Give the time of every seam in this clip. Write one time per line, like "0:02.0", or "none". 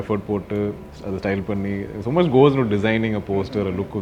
none